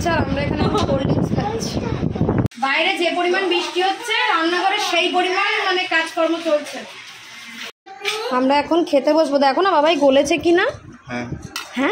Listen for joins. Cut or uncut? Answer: cut